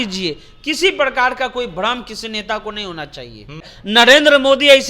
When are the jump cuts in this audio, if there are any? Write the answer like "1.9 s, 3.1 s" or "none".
3.7 s